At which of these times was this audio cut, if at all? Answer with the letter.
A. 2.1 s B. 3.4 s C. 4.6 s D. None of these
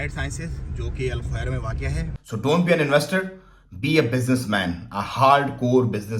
A